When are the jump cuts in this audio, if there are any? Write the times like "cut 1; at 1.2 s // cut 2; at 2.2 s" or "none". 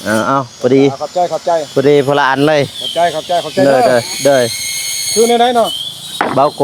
none